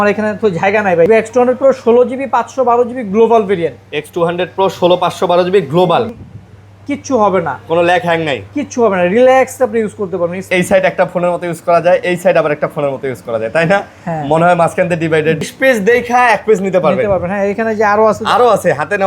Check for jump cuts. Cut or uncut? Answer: cut